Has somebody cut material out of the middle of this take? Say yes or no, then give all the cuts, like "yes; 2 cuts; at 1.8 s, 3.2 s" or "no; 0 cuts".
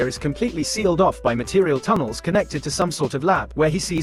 no; 0 cuts